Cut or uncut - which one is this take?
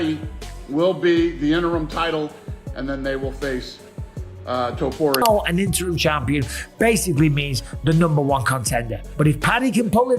cut